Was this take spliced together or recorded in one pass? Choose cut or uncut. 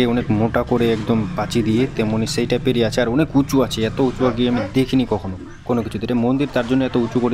uncut